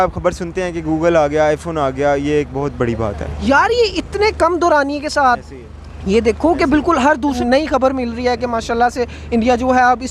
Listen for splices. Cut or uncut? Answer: cut